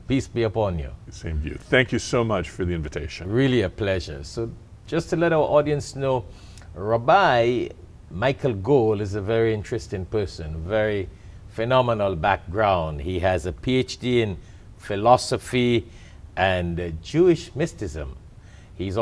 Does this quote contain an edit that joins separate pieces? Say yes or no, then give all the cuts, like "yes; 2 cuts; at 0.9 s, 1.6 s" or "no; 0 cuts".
no; 0 cuts